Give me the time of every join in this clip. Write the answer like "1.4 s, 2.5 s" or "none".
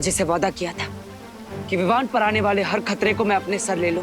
none